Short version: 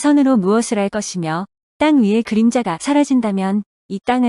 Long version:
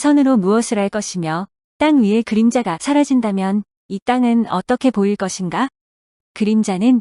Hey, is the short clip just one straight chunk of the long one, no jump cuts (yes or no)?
yes